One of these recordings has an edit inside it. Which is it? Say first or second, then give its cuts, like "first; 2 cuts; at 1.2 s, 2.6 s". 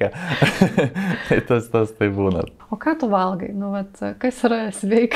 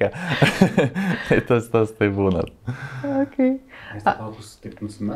first; 1 cut; at 2.6 s